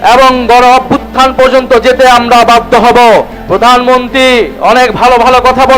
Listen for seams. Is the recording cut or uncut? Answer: cut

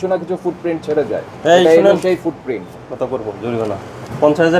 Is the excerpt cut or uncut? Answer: uncut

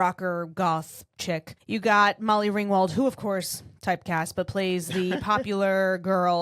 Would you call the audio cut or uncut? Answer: cut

